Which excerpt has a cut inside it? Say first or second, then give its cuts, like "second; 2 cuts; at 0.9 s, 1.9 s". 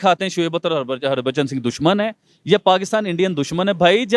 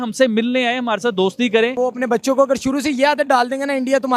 second; 1 cut; at 1.8 s